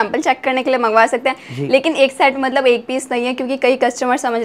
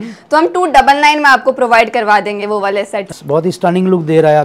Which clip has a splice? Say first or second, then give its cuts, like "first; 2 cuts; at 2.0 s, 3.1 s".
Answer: second; 1 cut; at 3.1 s